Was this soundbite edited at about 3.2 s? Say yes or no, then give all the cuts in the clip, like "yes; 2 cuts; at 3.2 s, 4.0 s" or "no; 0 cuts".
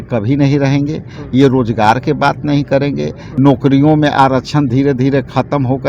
yes; 1 cut; at 3.2 s